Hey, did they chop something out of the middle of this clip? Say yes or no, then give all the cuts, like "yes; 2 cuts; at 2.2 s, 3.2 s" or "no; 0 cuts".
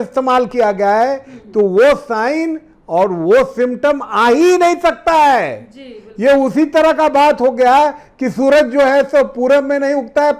no; 0 cuts